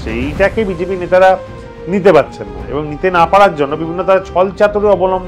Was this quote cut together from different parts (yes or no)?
no